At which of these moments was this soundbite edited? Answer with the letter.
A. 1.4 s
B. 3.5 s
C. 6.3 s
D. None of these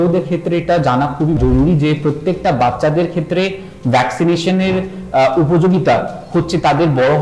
A